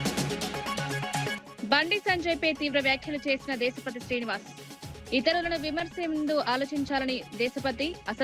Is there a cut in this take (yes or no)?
yes